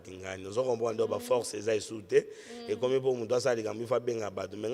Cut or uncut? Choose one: uncut